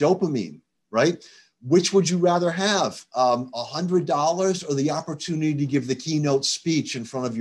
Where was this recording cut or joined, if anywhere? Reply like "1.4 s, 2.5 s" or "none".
none